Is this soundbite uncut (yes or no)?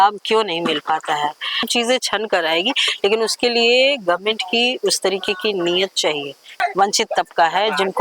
no